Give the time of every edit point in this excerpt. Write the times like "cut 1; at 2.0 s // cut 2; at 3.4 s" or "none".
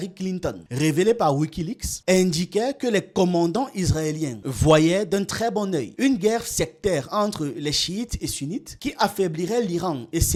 none

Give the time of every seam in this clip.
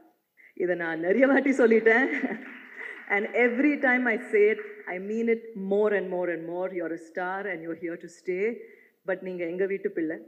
none

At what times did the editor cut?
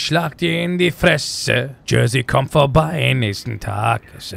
cut 1; at 1.8 s

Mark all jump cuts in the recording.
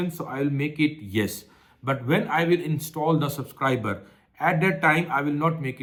none

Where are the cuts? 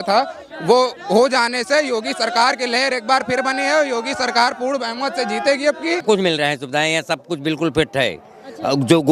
cut 1; at 6.0 s

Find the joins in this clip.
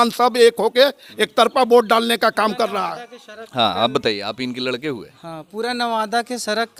none

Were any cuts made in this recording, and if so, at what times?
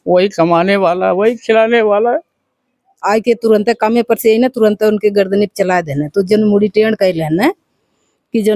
cut 1; at 2.9 s

